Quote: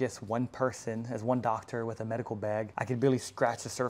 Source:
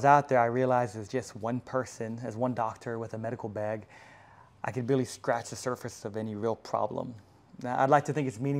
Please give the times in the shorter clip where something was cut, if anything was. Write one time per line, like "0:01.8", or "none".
0:02.7